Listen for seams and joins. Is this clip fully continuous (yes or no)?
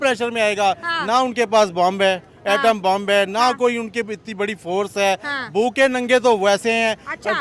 yes